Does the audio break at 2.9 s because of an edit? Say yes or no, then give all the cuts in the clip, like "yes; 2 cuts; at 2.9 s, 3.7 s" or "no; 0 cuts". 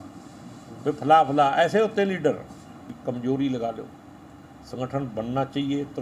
yes; 1 cut; at 2.9 s